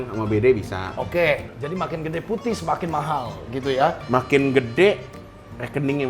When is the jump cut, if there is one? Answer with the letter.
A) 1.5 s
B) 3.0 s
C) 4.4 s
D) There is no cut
A